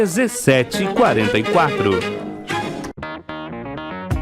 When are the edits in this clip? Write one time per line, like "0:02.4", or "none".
0:03.0